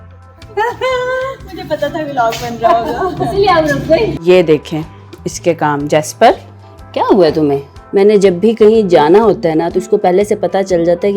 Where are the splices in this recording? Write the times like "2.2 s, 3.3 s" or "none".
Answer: 4.1 s, 7.7 s